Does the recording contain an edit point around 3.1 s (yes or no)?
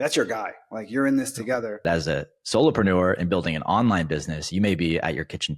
no